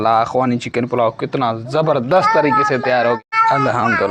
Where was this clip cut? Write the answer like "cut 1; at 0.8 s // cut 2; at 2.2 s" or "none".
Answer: cut 1; at 3.2 s